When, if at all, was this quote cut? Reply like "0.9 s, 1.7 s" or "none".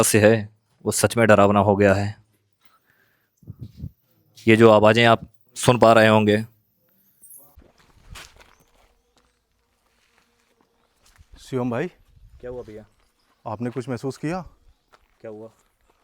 7.6 s